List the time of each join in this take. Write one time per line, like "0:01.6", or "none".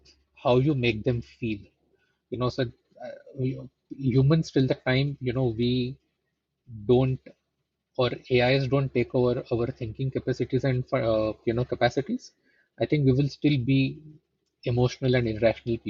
none